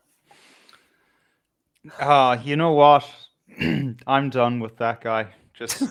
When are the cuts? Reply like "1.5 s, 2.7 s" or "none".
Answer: none